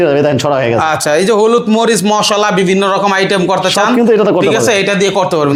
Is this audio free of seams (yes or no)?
yes